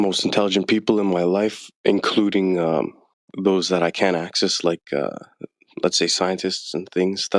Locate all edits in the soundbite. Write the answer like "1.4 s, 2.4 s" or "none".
none